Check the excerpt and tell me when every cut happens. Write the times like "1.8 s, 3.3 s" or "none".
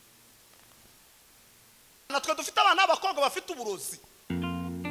2.1 s